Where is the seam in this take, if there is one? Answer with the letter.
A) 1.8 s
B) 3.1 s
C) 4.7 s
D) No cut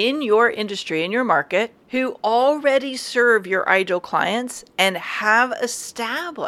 A